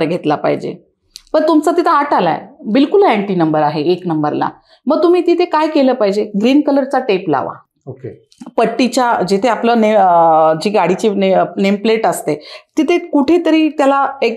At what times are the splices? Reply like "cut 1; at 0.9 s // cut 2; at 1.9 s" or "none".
none